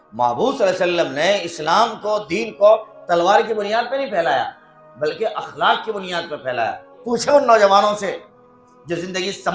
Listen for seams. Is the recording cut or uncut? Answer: cut